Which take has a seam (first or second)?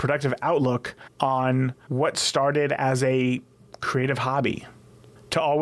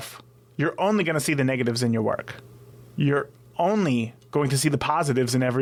first